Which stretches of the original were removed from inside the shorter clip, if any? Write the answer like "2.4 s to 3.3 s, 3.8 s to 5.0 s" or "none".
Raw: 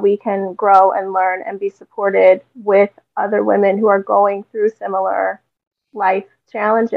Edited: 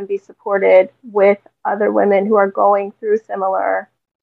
none

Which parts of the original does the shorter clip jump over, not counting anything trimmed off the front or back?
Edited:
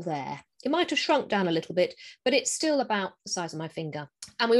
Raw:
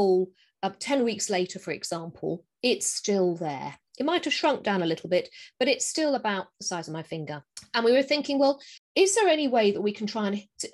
none

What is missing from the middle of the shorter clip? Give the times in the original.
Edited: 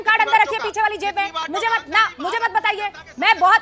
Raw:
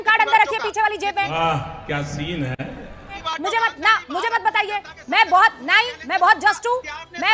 1.3 s to 3.2 s

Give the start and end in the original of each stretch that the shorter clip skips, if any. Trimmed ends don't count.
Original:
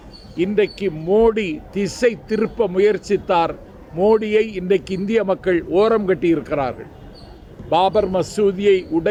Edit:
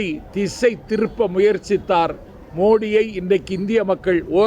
none

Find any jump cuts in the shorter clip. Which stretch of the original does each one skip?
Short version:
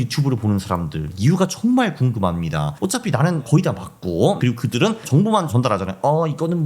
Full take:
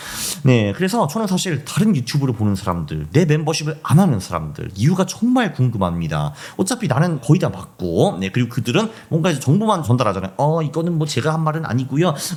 3.0 s to 4.6 s, 6.3 s to 6.5 s, 8.5 s to 9.1 s

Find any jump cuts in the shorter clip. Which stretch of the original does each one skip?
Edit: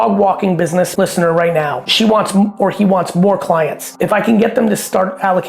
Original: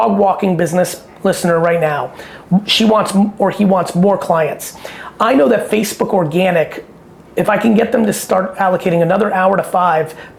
0.9 s to 1.2 s, 2.2 s to 2.7 s, 4.6 s to 7.2 s

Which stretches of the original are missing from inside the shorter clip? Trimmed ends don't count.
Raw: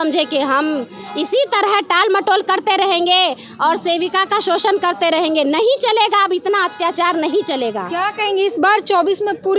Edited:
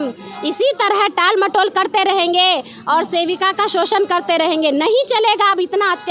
none

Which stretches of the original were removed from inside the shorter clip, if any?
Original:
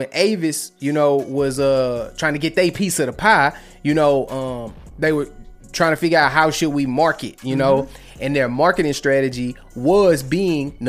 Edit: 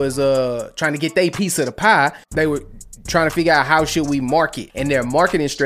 3.6 s to 4.9 s, 7.3 s to 8.1 s

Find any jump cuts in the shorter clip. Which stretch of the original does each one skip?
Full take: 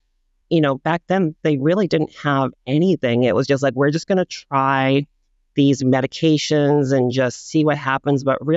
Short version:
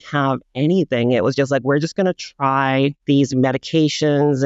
5.1 s to 5.5 s

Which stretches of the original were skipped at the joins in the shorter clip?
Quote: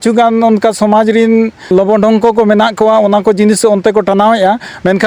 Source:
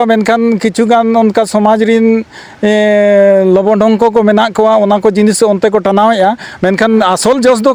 2.4 s to 3.5 s

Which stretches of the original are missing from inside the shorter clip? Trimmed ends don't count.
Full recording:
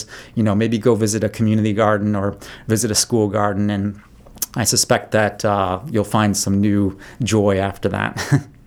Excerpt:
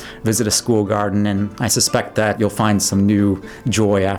4.0 s to 4.5 s, 5.3 s to 5.9 s

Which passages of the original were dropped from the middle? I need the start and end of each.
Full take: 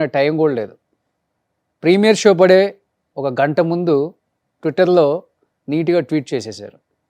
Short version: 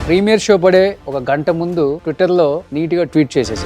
3.3 s to 4.1 s, 5.3 s to 5.6 s

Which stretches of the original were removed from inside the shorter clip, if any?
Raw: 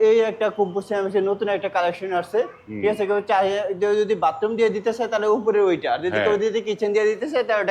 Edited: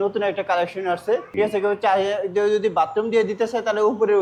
2.5 s to 2.7 s

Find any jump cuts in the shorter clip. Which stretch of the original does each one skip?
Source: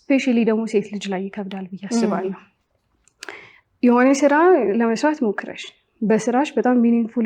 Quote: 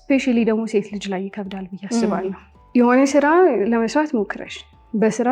2.5 s to 3.6 s

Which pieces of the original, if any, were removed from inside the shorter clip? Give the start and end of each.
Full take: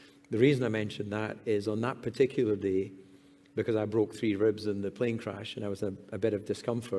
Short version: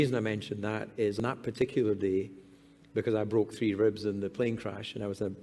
1.9 s to 2.0 s

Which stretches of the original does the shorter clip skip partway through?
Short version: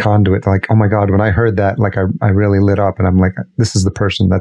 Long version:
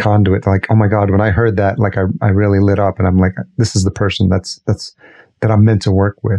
none

